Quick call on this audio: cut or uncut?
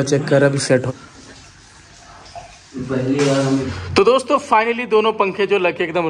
cut